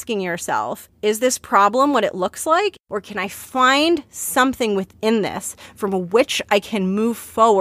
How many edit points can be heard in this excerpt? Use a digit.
2